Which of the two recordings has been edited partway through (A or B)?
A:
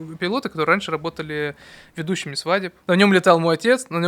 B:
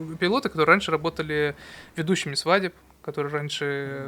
A